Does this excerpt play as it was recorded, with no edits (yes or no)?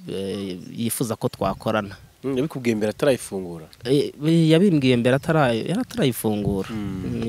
yes